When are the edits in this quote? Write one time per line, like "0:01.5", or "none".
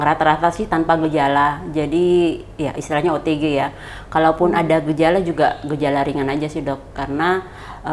none